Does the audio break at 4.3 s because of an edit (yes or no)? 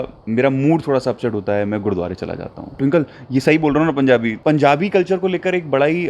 yes